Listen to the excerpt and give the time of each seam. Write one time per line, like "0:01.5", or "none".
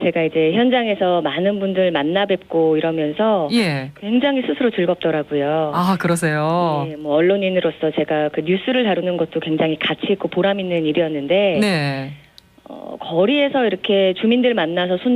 0:03.6

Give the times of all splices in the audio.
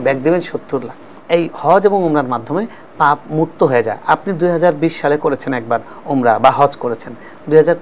0:01.1

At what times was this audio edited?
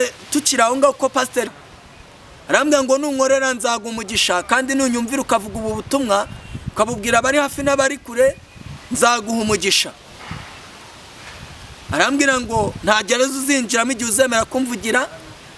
0:01.5

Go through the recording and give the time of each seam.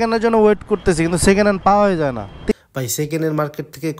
0:02.5

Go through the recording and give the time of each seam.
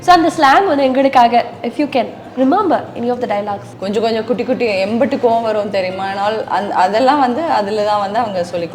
0:03.7

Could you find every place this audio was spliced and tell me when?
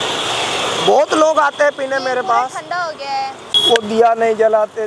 0:03.5

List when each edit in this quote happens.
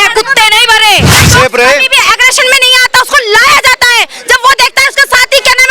0:01.2

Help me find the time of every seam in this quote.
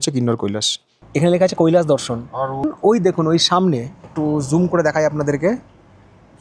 0:01.0
0:02.7

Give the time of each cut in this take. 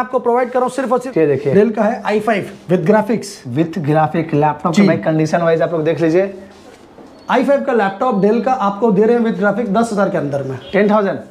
0:01.1

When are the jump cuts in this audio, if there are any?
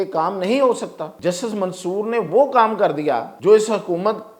0:01.0
0:03.3

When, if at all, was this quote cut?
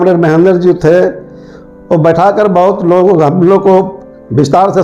none

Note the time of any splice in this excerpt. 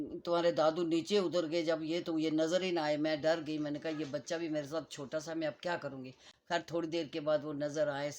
none

